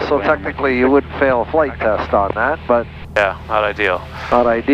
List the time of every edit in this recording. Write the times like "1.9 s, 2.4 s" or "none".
3.0 s